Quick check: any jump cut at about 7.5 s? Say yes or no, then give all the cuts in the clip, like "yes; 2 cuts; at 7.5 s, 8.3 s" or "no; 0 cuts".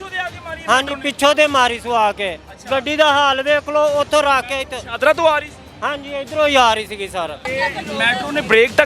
yes; 1 cut; at 7.5 s